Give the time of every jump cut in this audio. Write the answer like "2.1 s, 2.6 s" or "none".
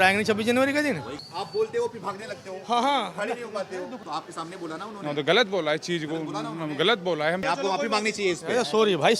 1.2 s, 4.0 s, 7.4 s